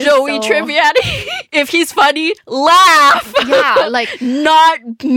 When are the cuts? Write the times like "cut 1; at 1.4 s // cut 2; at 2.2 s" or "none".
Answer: cut 1; at 1.4 s